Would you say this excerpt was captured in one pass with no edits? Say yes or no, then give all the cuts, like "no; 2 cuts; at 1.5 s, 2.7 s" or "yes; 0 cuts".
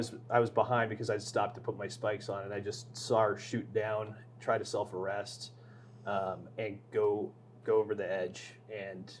yes; 0 cuts